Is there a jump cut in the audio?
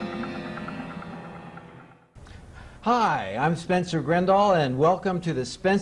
no; 0 cuts

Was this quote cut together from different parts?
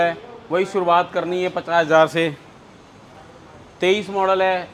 no; 0 cuts

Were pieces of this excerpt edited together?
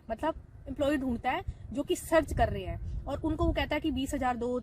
no; 0 cuts

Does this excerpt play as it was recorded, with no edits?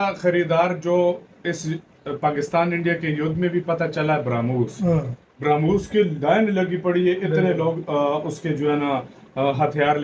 yes; 0 cuts

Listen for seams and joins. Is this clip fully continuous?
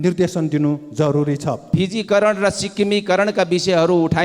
no; 1 cut; at 1.6 s

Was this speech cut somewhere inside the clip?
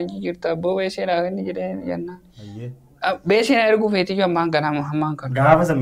no; 0 cuts

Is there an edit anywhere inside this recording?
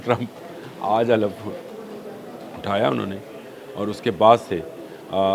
no; 0 cuts

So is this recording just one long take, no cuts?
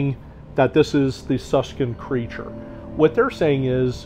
yes; 0 cuts

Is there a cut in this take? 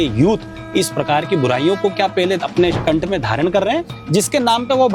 no; 0 cuts

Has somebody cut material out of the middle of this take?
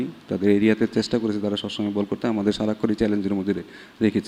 no; 0 cuts

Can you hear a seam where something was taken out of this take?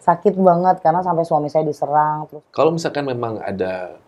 yes; 1 cut; at 2.3 s

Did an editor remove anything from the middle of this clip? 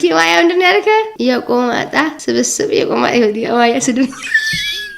yes; 1 cut; at 1.1 s

